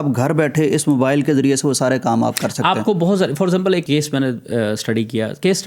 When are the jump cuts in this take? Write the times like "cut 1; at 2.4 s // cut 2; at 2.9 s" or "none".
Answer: none